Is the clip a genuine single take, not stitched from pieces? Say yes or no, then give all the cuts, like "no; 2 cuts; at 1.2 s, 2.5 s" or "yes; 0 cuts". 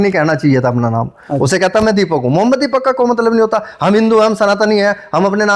yes; 0 cuts